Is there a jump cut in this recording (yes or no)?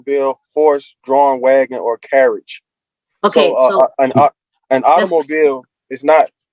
no